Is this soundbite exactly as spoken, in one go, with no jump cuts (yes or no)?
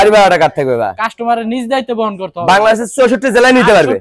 yes